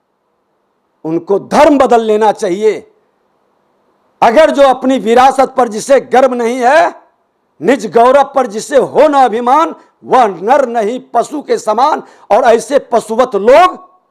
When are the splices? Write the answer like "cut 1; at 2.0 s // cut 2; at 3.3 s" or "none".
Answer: none